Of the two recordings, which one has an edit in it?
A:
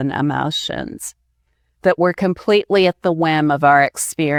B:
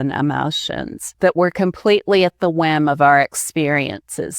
B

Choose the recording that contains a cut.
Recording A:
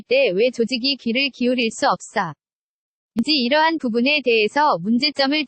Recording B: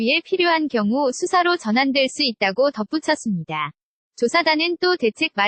A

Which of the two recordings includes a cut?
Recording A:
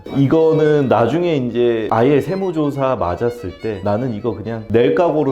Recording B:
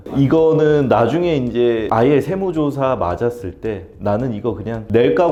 A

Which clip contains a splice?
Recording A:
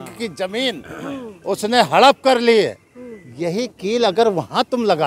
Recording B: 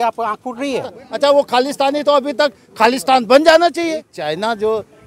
B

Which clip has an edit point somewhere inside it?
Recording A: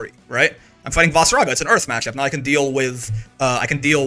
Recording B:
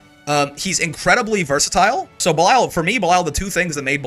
B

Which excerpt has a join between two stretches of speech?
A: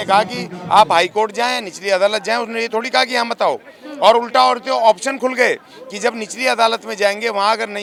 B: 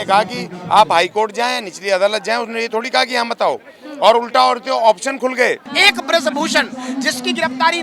B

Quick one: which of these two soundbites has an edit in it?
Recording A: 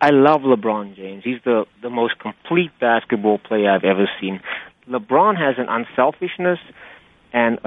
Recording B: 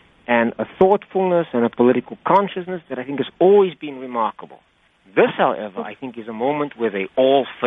A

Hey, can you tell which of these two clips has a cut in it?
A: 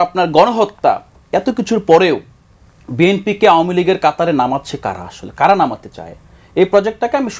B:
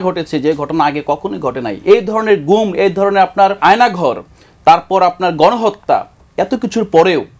B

